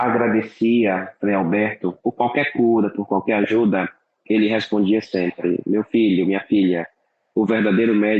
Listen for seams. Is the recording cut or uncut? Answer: uncut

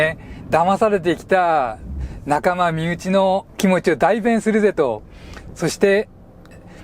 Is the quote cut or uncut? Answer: cut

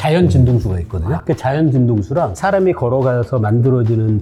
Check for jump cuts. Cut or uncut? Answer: uncut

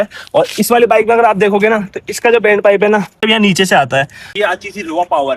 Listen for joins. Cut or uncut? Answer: cut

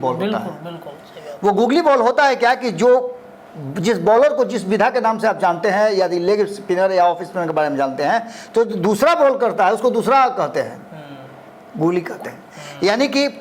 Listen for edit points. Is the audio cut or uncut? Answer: uncut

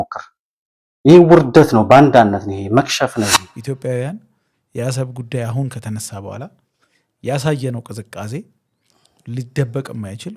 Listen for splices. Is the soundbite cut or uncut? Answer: cut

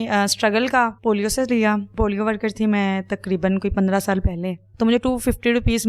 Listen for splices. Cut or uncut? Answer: cut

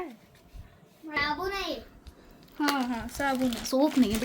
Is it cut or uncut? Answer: cut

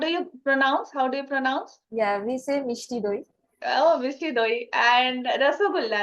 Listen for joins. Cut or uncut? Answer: uncut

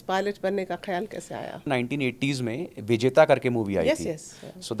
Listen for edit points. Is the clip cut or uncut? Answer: cut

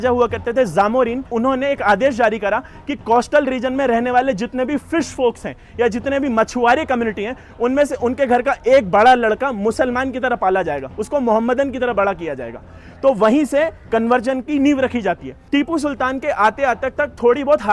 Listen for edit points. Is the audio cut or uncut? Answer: cut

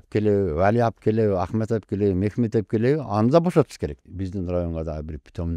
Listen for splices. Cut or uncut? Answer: cut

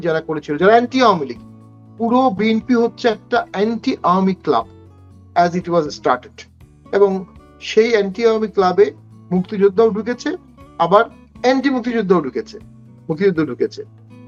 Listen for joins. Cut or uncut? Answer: uncut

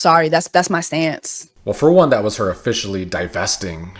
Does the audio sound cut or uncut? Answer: uncut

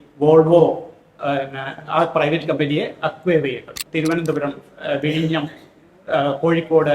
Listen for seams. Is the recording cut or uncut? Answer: cut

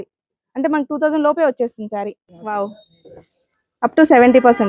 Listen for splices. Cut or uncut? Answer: cut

